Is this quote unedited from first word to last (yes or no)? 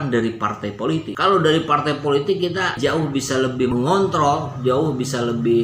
no